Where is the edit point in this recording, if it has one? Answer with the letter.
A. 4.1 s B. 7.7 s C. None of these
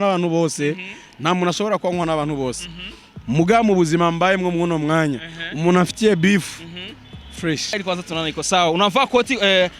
B